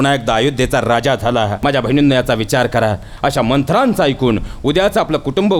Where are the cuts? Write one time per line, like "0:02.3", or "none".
0:01.5